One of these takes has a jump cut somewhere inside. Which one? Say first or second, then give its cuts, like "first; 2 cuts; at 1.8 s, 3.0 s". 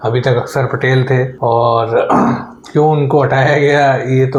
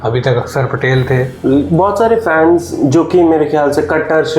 second; 1 cut; at 1.3 s